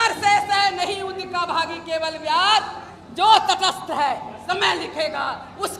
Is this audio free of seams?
no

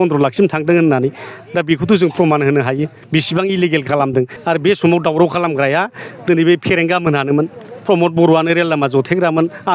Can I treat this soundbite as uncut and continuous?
no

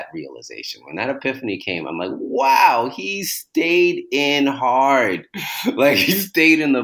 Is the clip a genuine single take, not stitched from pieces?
yes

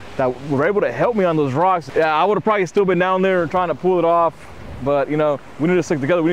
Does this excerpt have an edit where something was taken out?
yes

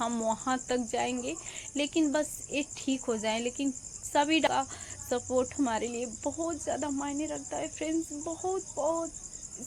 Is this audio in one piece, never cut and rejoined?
no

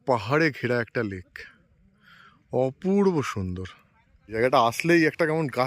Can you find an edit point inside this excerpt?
yes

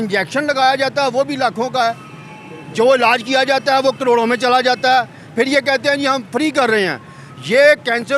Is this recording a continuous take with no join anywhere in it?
yes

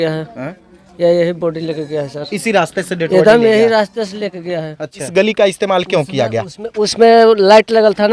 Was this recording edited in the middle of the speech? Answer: yes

